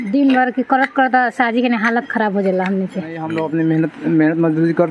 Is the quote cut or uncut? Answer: cut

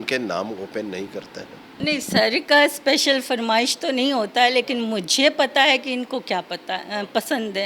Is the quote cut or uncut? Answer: cut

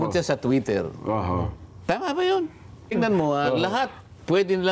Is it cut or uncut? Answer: cut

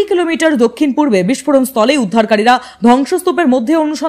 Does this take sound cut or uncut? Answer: uncut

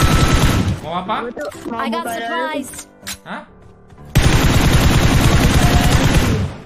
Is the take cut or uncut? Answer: uncut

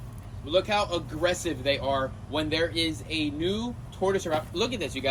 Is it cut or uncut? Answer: uncut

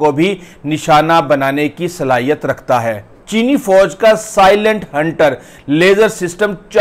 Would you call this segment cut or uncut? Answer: cut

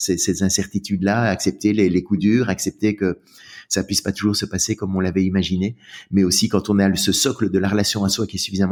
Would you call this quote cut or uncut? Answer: uncut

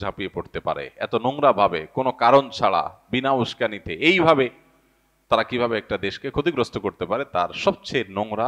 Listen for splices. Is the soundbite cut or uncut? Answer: uncut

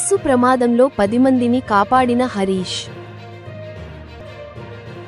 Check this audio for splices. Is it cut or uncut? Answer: uncut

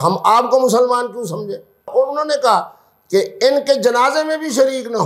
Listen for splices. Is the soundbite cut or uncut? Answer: cut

